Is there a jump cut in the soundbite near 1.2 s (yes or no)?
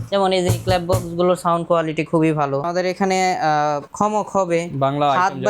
no